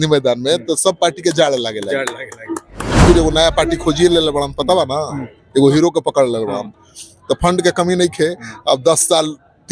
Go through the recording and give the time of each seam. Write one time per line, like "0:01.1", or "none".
0:02.9